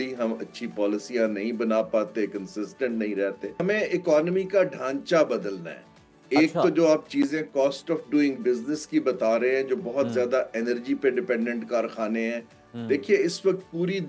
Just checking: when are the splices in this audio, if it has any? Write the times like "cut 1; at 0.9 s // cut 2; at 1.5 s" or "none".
cut 1; at 3.6 s